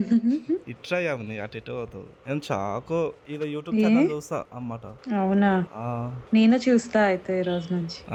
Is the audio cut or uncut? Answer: uncut